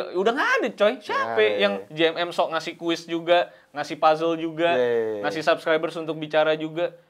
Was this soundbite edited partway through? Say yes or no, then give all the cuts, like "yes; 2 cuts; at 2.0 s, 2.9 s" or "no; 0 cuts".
no; 0 cuts